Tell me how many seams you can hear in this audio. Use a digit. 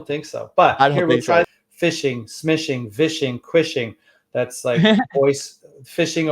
1